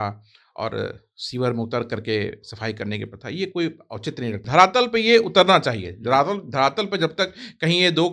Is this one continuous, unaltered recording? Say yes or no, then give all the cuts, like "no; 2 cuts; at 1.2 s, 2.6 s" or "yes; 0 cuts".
no; 1 cut; at 4.4 s